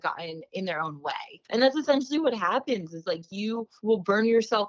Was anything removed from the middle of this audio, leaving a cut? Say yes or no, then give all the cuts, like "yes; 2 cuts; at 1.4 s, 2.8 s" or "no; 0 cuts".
yes; 1 cut; at 1.3 s